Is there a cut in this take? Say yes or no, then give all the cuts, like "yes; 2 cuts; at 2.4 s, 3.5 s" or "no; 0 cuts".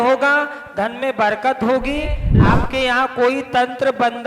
yes; 1 cut; at 2.3 s